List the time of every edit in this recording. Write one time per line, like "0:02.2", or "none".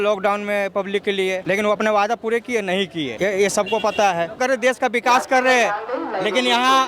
0:01.4
0:03.1
0:04.4